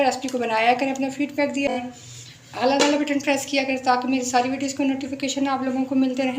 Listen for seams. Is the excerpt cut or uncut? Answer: cut